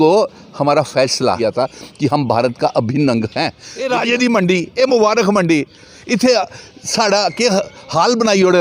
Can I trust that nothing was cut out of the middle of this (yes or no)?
no